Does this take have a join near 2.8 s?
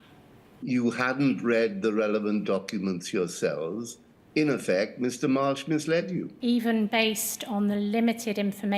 no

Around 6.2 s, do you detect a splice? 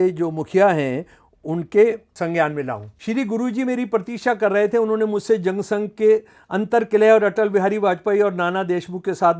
no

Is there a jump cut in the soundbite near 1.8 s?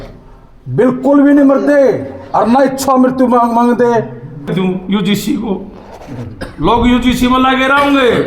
no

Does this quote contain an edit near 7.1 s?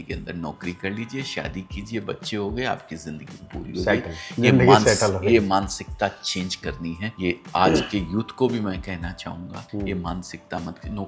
no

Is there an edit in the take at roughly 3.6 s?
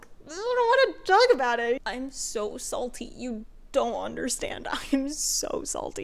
no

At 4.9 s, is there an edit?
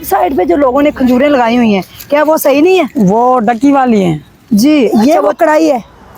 yes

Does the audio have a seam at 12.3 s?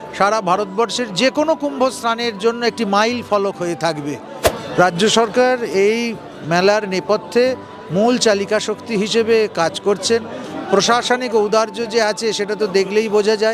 no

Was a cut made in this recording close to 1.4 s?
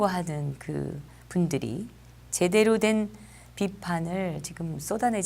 no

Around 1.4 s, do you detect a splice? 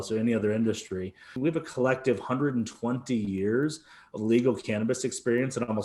yes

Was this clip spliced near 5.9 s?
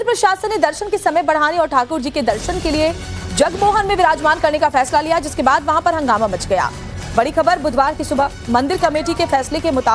yes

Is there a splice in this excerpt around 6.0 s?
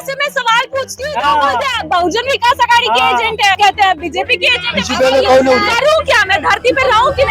no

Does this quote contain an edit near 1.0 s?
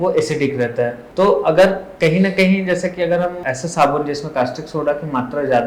yes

